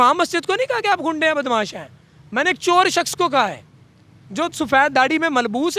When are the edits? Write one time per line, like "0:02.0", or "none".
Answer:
none